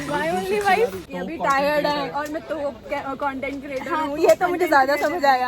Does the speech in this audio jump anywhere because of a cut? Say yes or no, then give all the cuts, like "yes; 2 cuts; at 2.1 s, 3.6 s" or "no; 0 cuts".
yes; 1 cut; at 1.1 s